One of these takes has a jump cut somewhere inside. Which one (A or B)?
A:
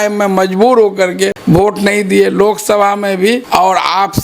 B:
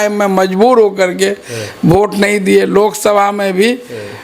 A